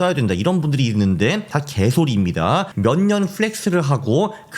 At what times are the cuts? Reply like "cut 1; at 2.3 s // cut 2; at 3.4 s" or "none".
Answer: cut 1; at 1.5 s // cut 2; at 2.7 s